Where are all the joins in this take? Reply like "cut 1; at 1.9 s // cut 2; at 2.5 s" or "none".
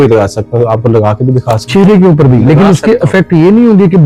none